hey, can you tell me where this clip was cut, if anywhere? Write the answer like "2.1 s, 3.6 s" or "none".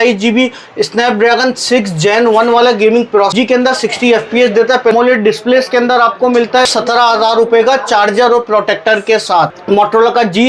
3.3 s, 4.9 s, 6.7 s, 9.6 s